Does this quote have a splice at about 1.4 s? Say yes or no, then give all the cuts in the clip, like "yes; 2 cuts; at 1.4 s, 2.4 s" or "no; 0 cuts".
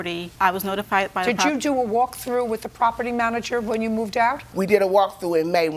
yes; 2 cuts; at 1.4 s, 4.5 s